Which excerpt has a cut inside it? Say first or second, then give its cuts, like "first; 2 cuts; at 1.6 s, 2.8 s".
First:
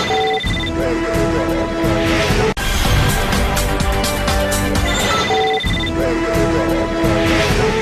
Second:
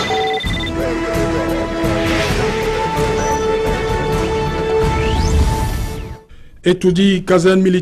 second; 1 cut; at 2.5 s